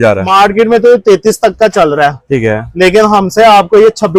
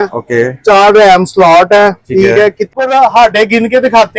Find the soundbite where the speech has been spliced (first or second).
second